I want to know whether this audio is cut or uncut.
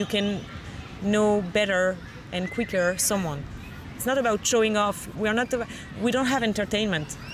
cut